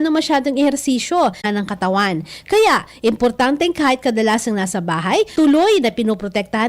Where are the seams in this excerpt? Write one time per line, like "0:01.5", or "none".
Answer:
0:01.5

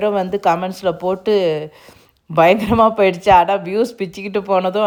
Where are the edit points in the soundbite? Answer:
none

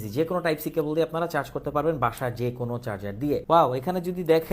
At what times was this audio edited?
0:03.4

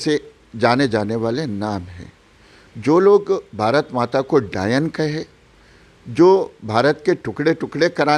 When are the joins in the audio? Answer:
none

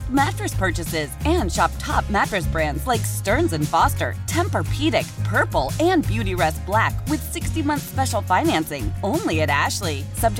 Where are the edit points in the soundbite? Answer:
none

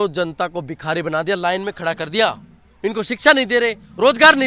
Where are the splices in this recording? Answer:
none

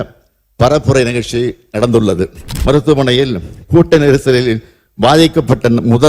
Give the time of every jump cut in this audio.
0:02.4

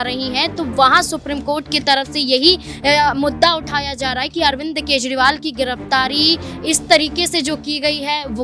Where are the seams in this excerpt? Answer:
none

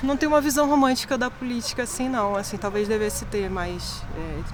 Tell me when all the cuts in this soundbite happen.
none

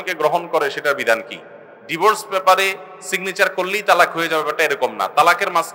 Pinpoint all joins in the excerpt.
none

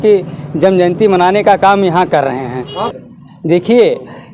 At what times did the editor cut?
0:02.9

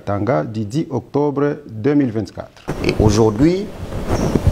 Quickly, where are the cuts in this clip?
0:02.7

